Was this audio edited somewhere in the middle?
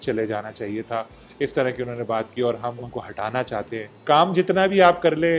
yes; 2 cuts; at 2.8 s, 4.0 s

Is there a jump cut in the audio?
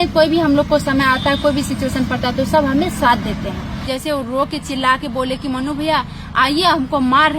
yes; 1 cut; at 3.8 s

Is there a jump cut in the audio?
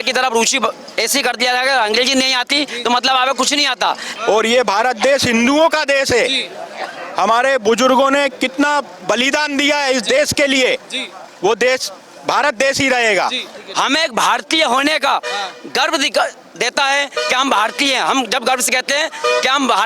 yes; 2 cuts; at 4.1 s, 13.6 s

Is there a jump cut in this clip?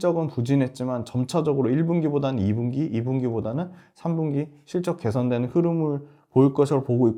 no; 0 cuts

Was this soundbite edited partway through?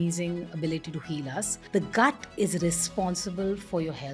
yes; 1 cut; at 1.6 s

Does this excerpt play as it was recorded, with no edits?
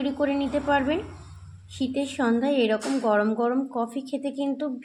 yes; 0 cuts

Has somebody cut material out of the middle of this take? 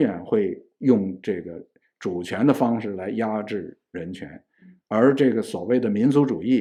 no; 0 cuts

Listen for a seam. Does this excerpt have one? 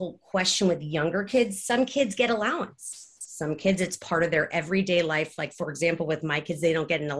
no; 0 cuts

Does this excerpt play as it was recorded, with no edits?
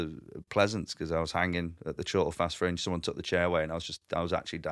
yes; 0 cuts

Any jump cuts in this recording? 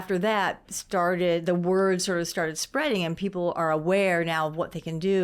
no; 0 cuts

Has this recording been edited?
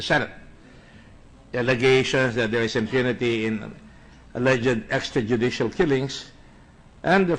no; 0 cuts

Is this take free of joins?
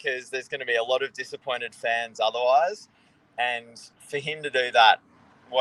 yes; 0 cuts

